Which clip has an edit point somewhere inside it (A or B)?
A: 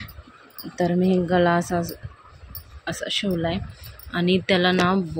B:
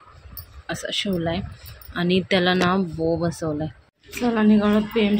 B